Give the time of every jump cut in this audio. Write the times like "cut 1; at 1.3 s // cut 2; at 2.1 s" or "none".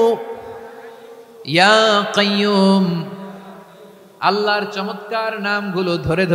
none